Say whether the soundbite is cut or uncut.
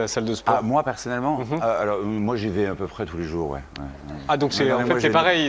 uncut